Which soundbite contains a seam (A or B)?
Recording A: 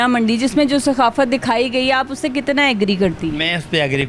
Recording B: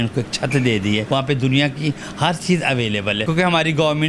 B